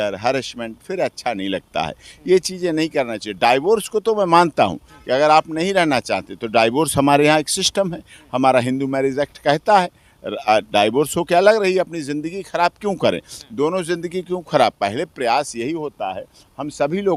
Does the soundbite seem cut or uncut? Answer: uncut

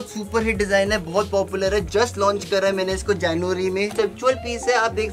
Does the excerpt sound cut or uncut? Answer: cut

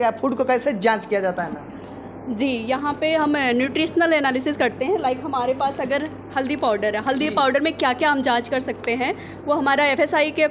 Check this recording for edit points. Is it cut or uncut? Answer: uncut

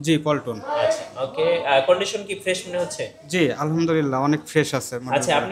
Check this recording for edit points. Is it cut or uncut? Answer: uncut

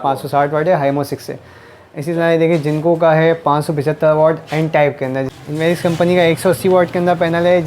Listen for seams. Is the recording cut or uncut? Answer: cut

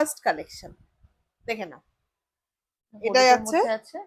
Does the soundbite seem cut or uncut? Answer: uncut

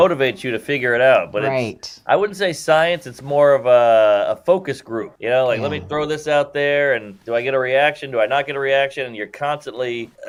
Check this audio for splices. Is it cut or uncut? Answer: uncut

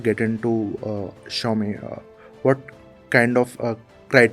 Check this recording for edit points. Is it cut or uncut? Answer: uncut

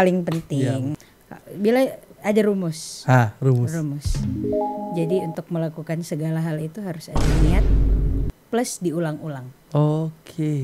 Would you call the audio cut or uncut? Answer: cut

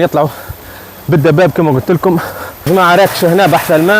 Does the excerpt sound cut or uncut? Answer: cut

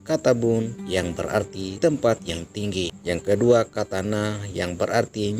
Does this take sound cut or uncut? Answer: cut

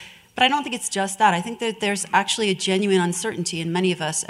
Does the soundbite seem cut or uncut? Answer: uncut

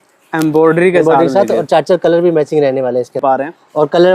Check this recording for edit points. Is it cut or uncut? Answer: cut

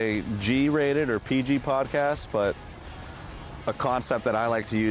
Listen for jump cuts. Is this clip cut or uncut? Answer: uncut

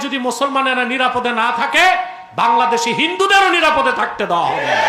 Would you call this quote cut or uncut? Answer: uncut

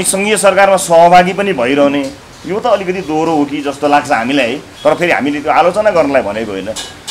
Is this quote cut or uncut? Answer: uncut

